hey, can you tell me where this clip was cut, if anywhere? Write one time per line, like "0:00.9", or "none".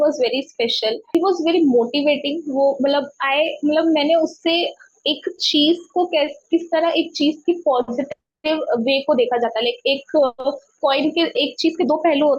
0:01.1